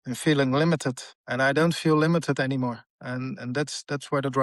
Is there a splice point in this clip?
no; 0 cuts

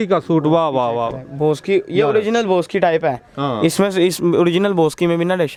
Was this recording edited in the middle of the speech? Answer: no; 0 cuts

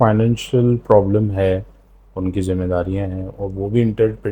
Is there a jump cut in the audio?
no; 0 cuts

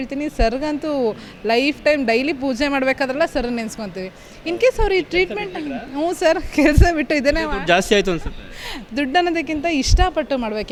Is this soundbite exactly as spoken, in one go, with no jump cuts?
yes; 0 cuts

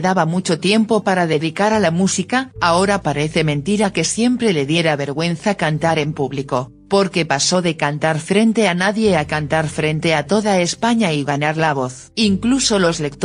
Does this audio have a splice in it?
no; 0 cuts

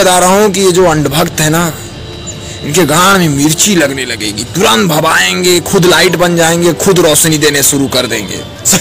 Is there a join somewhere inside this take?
no; 0 cuts

